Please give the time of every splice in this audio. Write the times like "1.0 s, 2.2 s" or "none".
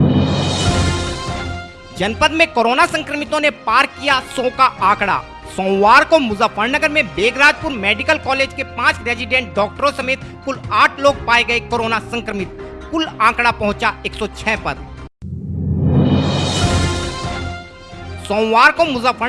1.7 s